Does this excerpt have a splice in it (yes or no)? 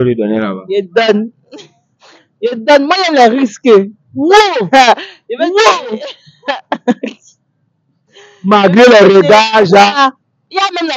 no